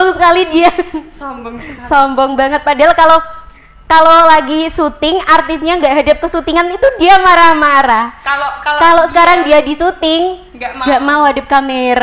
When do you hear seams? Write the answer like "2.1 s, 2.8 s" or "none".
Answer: none